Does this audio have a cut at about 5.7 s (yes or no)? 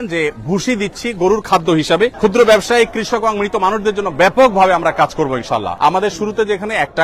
yes